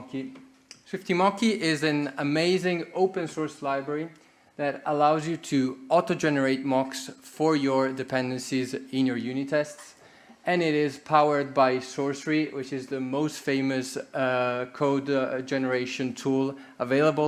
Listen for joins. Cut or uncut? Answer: uncut